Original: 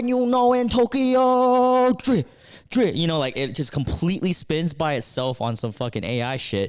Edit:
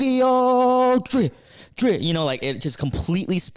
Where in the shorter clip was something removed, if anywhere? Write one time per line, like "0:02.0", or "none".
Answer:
none